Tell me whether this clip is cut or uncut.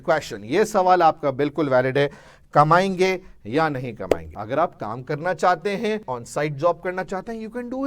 cut